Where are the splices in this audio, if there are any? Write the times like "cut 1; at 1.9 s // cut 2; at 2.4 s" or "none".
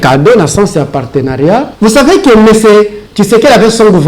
cut 1; at 1.7 s